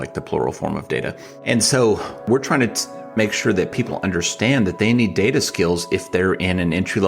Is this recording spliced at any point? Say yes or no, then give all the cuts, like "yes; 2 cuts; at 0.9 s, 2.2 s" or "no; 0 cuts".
yes; 2 cuts; at 1.3 s, 2.2 s